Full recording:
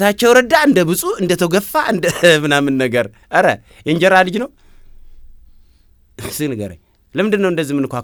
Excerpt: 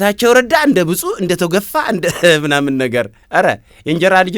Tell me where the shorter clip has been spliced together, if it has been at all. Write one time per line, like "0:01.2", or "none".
none